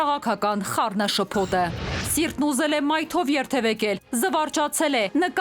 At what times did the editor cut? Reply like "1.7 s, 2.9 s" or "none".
2.0 s